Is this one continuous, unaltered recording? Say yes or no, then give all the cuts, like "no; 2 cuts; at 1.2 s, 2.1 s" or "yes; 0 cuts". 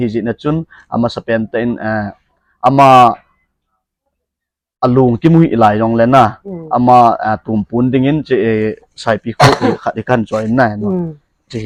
yes; 0 cuts